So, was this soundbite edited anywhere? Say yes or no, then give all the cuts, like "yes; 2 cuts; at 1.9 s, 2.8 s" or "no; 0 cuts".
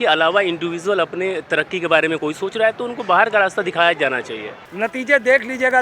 yes; 1 cut; at 4.6 s